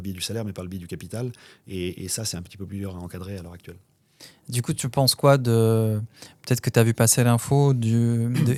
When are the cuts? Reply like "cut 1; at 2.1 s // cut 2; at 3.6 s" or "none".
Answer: none